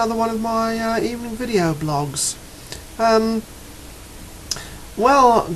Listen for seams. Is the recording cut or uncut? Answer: uncut